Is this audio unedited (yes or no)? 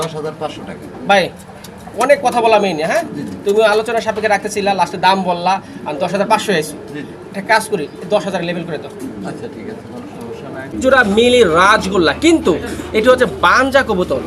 no